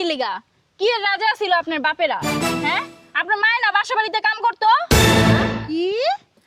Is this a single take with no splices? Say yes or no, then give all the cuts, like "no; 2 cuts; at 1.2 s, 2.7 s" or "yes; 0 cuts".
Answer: yes; 0 cuts